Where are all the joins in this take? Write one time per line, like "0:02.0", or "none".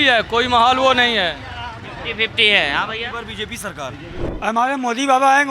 0:04.2